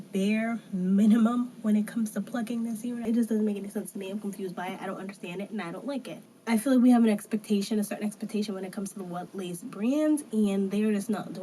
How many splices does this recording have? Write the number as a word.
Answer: two